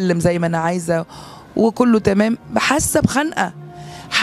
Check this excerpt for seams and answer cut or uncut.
uncut